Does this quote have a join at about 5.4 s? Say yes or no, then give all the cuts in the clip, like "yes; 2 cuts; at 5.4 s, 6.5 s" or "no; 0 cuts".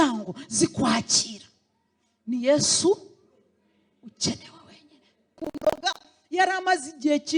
yes; 1 cut; at 5.4 s